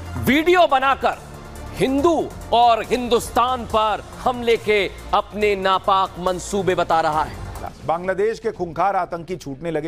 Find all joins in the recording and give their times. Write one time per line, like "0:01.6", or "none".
0:07.7